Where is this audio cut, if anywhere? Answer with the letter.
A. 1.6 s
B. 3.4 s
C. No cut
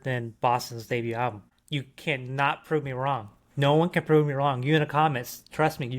A